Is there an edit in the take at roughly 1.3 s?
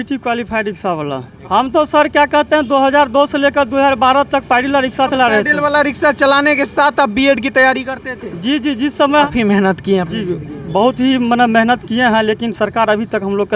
yes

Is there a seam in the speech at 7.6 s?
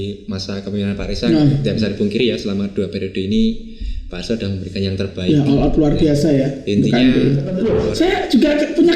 yes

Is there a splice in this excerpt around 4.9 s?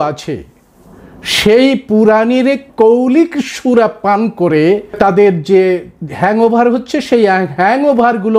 yes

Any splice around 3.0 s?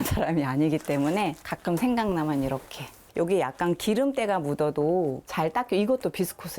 yes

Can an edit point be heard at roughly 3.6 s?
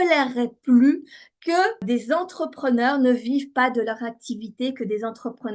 no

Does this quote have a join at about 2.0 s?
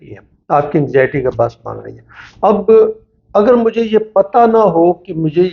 no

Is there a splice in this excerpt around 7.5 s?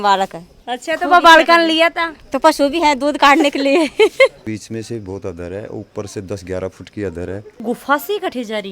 yes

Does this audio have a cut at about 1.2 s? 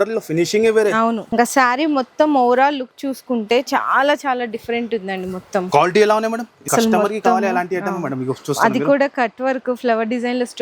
yes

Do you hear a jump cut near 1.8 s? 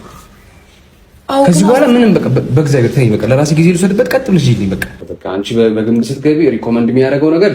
no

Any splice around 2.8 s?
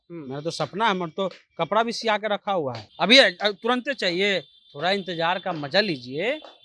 yes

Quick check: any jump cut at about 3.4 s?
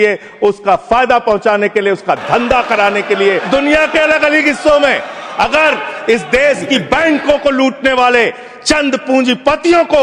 yes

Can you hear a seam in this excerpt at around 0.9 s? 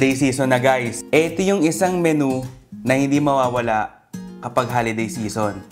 yes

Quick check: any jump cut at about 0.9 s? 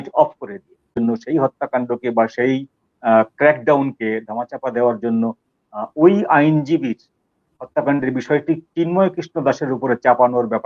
yes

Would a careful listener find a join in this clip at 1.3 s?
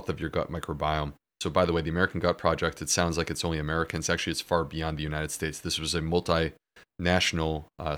yes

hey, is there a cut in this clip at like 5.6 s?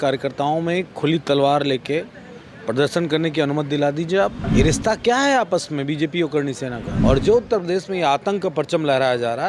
no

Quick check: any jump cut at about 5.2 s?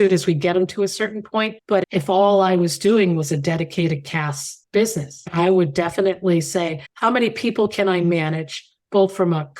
yes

